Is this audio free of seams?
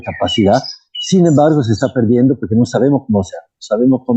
yes; 0 cuts

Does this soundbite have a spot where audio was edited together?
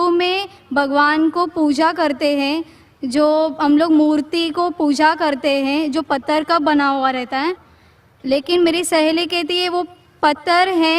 yes; 1 cut; at 4.8 s

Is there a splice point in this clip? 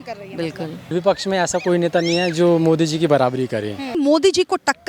yes; 2 cuts; at 0.9 s, 3.9 s

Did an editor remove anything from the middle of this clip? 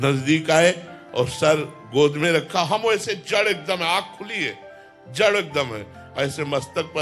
no; 0 cuts

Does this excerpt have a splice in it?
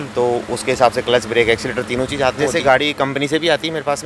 yes; 1 cut; at 2.4 s

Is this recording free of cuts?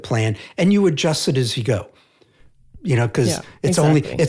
yes; 0 cuts

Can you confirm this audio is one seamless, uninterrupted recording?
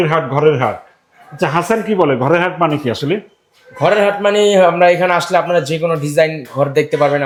yes; 0 cuts

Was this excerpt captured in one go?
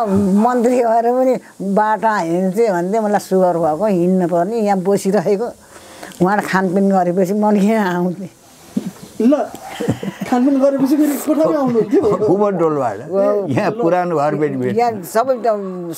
yes; 0 cuts

